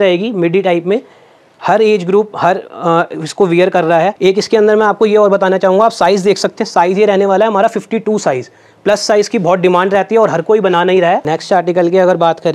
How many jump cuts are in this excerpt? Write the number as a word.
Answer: two